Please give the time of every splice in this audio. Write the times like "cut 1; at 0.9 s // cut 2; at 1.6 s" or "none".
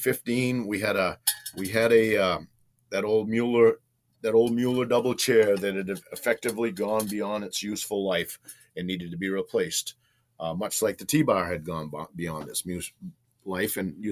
none